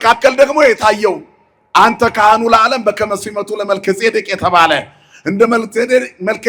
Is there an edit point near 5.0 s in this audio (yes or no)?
no